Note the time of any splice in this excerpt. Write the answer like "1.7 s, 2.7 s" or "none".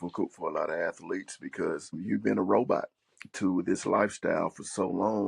2.0 s